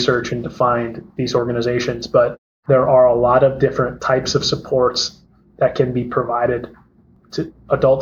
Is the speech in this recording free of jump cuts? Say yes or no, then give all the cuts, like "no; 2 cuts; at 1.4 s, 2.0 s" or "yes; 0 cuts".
no; 1 cut; at 2.5 s